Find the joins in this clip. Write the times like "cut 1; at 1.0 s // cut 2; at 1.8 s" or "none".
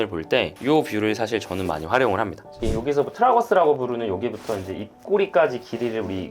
cut 1; at 2.6 s